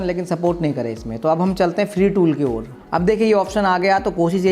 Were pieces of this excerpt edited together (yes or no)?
yes